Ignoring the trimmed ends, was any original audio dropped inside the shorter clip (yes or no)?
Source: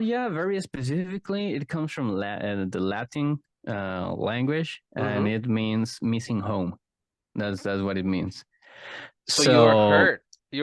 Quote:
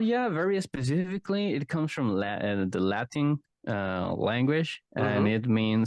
no